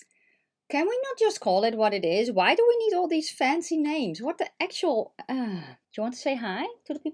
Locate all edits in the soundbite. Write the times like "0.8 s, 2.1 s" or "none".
5.8 s